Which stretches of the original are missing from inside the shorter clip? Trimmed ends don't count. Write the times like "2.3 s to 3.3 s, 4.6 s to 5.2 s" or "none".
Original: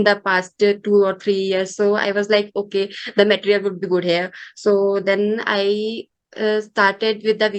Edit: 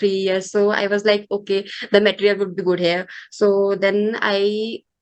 none